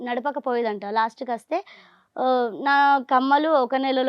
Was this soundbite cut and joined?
no; 0 cuts

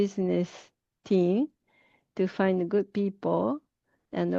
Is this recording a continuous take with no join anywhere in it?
yes; 0 cuts

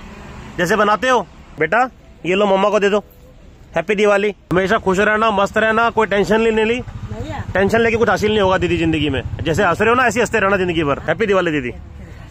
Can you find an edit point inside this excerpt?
yes; 2 cuts; at 4.5 s, 11.0 s

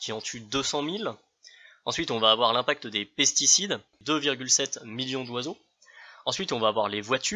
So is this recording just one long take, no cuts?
no; 1 cut; at 3.9 s

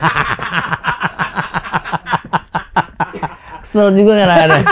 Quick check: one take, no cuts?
yes; 0 cuts

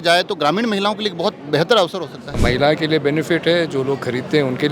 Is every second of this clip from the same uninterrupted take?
no; 1 cut; at 2.4 s

